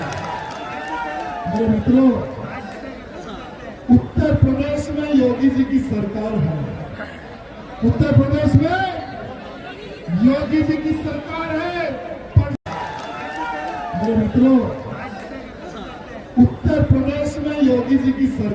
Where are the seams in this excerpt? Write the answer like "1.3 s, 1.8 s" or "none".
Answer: 12.6 s